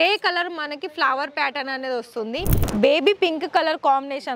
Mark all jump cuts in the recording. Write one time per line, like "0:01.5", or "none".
0:02.6